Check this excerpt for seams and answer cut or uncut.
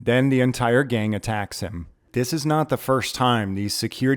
cut